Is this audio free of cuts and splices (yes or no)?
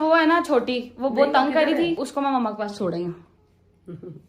no